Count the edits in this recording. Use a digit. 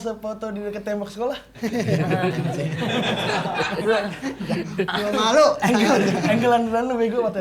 0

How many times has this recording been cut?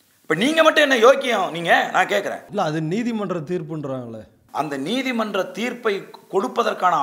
2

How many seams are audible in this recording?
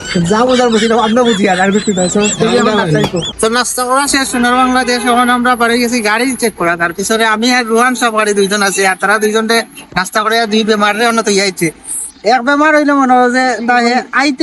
1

